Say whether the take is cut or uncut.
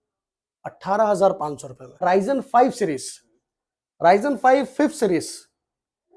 cut